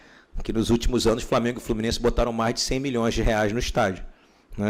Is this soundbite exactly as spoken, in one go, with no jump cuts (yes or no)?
yes